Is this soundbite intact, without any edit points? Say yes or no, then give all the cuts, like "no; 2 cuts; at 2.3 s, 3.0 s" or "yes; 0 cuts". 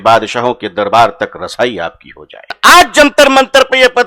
no; 1 cut; at 2.6 s